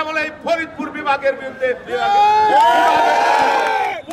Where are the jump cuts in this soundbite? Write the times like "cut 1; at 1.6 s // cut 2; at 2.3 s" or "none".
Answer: none